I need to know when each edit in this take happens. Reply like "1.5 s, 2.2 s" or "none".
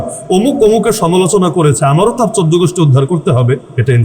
none